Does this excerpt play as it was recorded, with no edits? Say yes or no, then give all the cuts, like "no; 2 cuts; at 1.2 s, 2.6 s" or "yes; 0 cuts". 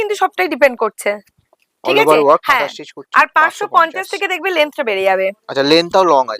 yes; 0 cuts